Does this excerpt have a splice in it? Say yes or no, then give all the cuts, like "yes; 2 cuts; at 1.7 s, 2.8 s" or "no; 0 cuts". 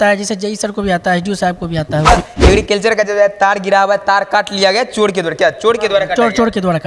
yes; 1 cut; at 2.1 s